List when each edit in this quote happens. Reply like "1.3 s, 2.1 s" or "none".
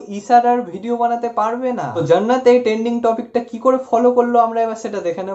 none